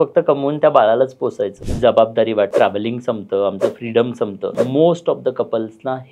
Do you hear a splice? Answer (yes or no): yes